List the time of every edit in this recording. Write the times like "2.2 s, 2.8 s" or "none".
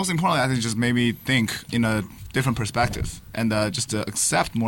1.7 s